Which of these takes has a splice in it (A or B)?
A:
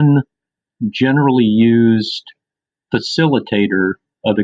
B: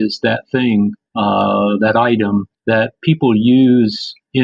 B